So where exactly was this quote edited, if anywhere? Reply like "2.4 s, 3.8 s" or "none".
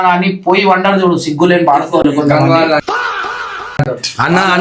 none